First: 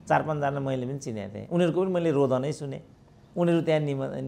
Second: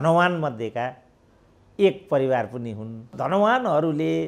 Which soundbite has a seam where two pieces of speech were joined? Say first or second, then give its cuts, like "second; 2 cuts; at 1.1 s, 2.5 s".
second; 1 cut; at 3.1 s